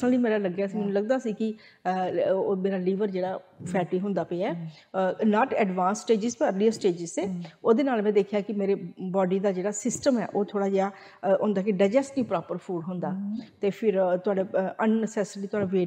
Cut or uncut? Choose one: uncut